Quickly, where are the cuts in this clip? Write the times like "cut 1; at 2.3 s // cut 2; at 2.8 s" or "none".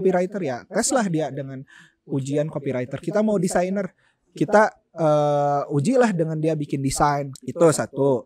cut 1; at 7.3 s